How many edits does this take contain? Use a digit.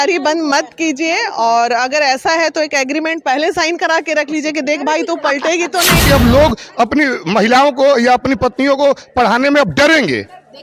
1